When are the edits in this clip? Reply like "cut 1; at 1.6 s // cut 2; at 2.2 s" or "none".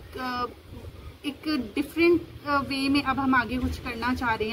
none